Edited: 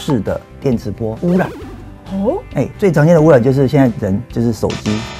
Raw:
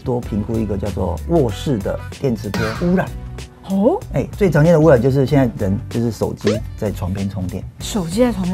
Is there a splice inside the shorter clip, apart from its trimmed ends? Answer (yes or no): no